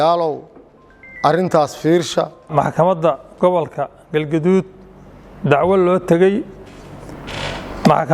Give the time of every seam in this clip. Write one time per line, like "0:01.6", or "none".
0:02.5